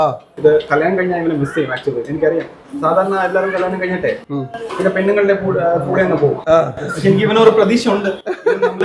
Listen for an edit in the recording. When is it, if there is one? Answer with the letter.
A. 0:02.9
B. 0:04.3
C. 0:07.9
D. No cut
D